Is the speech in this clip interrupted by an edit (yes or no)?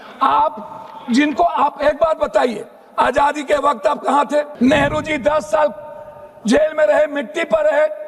yes